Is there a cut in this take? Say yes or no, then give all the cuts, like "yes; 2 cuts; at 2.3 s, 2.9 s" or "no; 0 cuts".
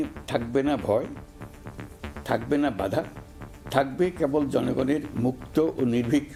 no; 0 cuts